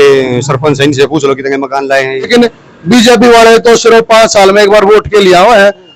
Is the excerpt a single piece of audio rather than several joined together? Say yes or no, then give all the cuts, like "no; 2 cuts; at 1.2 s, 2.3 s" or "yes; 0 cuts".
no; 1 cut; at 2.3 s